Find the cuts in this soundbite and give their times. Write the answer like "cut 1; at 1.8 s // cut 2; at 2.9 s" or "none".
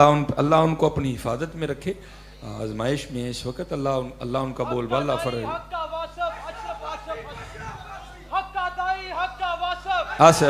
none